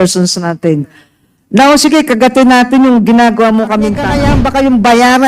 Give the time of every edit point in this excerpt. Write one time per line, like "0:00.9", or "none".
0:04.2